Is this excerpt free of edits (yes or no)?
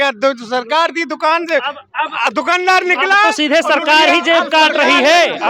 yes